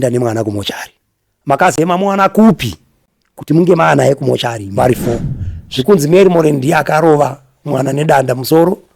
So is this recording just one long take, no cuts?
no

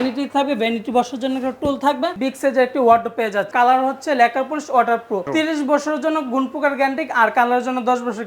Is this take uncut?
no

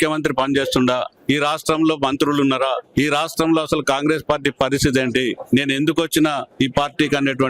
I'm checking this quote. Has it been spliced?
yes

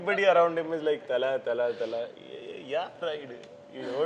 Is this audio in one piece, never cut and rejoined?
yes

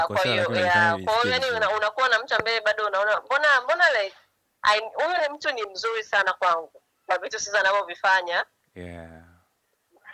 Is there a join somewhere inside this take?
no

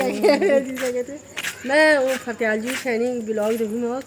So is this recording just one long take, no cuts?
yes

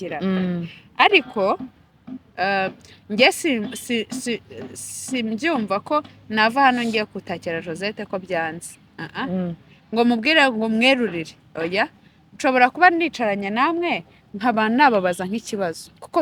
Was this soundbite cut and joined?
no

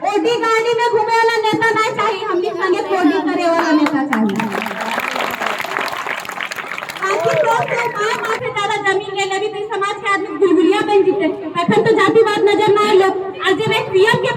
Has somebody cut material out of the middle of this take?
yes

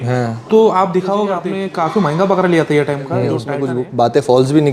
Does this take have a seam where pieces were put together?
yes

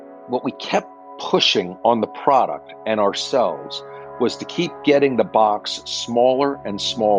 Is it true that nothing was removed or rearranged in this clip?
yes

